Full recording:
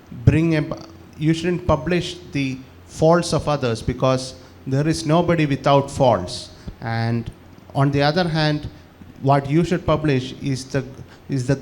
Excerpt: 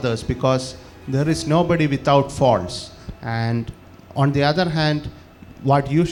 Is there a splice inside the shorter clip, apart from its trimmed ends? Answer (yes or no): no